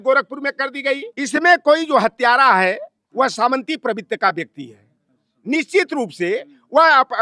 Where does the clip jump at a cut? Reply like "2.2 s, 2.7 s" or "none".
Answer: 1.1 s